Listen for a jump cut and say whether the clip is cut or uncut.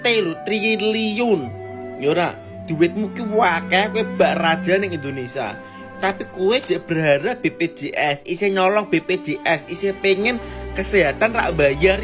uncut